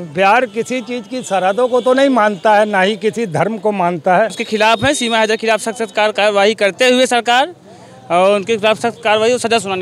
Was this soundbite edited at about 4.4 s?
yes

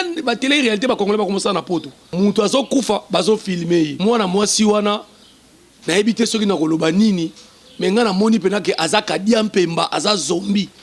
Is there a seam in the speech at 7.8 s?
no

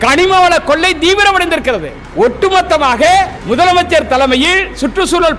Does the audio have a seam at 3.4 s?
yes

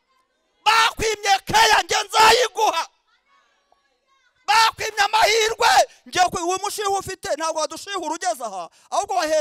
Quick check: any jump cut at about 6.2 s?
yes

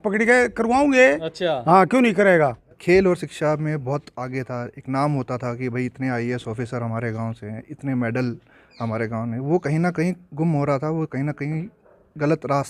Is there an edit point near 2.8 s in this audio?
yes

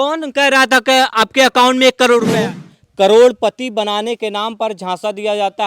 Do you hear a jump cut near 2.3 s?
yes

